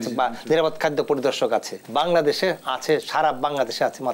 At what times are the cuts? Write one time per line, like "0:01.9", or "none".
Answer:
0:01.8